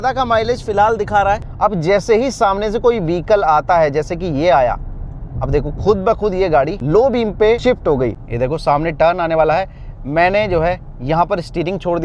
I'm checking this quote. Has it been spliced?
yes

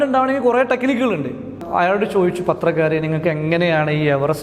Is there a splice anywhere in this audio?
yes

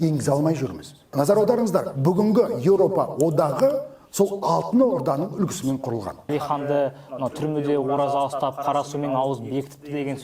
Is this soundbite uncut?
no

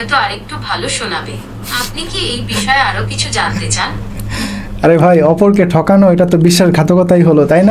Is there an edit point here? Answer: no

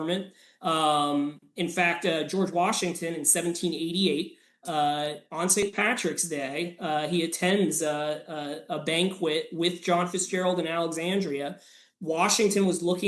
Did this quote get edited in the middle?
yes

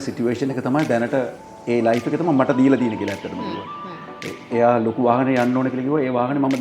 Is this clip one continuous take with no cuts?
yes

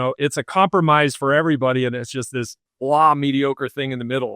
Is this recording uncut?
no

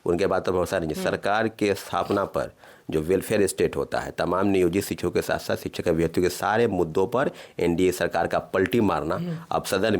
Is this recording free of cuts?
yes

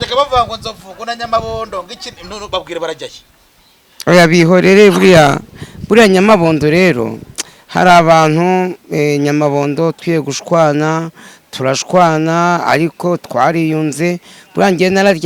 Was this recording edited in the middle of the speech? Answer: no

